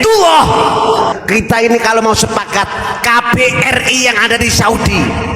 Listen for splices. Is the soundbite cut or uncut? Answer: cut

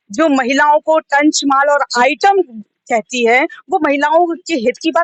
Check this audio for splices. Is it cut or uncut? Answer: uncut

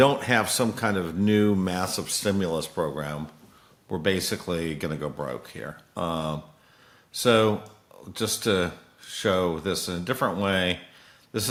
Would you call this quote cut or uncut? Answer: uncut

